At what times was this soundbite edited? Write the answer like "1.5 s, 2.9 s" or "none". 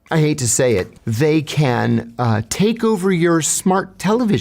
1.0 s